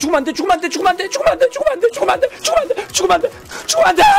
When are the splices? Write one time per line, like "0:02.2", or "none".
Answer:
none